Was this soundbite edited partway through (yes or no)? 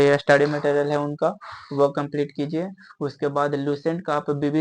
no